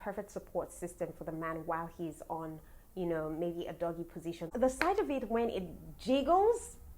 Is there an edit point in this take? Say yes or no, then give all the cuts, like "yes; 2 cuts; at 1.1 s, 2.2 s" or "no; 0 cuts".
yes; 1 cut; at 4.5 s